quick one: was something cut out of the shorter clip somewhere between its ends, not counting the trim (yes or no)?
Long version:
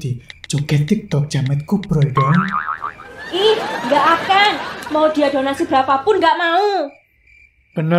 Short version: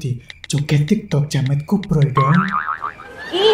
no